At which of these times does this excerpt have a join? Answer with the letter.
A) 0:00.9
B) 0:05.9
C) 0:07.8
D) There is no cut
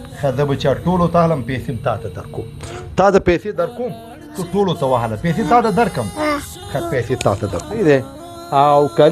C